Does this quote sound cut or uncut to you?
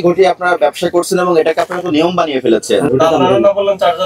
cut